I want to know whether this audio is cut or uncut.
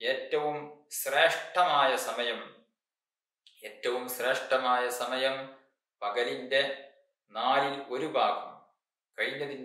uncut